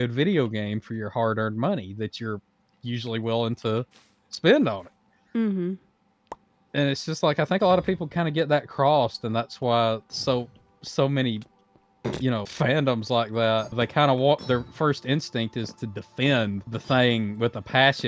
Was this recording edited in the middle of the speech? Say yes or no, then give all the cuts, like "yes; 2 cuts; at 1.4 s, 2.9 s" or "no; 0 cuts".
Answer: yes; 3 cuts; at 12.5 s, 13.8 s, 16.7 s